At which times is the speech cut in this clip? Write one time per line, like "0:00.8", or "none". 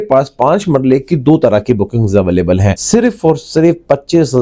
0:02.8

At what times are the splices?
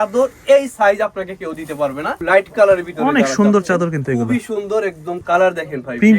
0:02.2
0:05.2

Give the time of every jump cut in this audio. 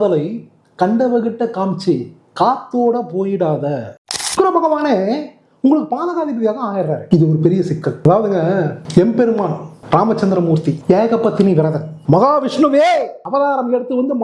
0:03.8

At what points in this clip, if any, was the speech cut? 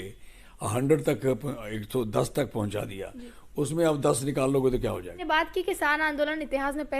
0:05.2

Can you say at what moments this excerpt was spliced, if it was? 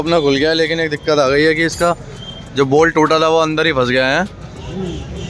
none

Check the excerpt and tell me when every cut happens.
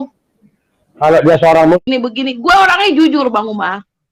0:01.9

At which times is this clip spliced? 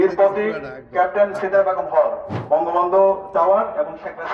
0:02.3

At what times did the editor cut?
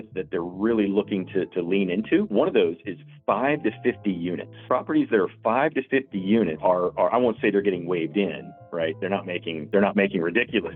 0:02.3
0:04.5
0:06.6
0:09.6

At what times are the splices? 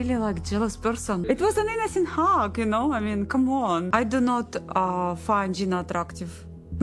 0:01.2
0:03.9

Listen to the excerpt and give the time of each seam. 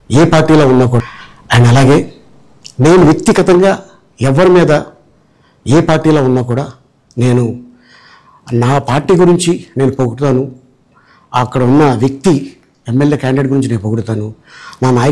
0:01.0

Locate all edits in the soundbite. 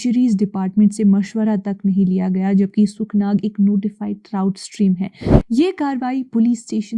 0:05.2

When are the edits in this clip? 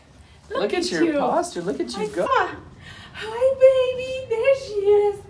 0:02.3

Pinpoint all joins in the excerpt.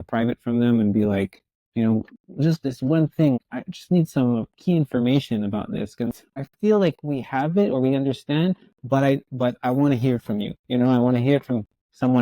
0:03.4
0:06.1

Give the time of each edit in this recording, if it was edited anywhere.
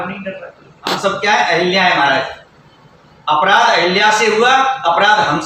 0:01.0

